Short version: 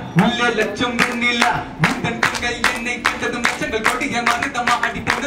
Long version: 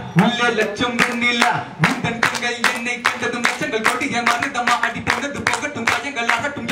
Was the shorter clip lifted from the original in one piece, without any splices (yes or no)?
yes